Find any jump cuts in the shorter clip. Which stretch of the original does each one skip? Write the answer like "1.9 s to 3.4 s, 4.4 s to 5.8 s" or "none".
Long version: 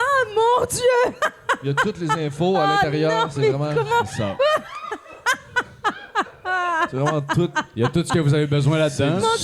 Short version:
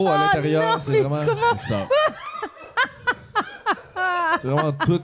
none